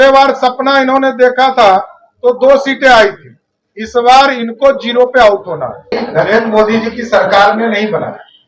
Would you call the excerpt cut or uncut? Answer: cut